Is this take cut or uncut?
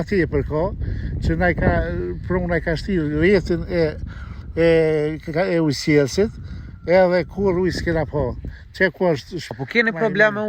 cut